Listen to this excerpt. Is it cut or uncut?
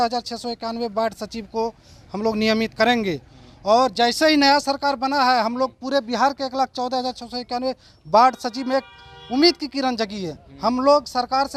uncut